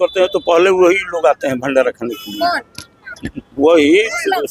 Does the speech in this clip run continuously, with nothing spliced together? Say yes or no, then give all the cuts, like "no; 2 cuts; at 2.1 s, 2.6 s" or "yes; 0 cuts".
yes; 0 cuts